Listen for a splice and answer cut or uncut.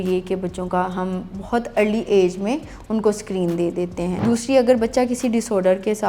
cut